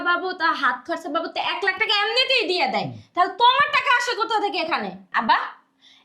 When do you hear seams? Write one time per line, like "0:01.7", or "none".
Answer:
0:05.0